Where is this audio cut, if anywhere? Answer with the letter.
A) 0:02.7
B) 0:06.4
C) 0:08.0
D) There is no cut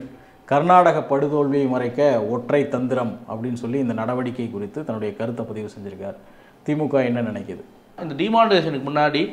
C